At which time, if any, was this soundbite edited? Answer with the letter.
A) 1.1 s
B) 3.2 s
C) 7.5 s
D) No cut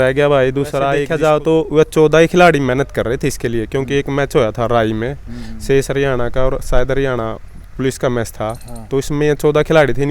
A